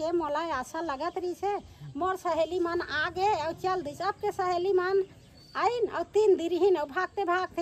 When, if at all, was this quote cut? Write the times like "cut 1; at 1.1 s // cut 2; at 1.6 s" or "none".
none